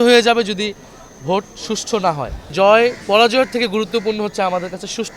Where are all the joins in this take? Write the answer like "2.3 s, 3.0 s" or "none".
2.5 s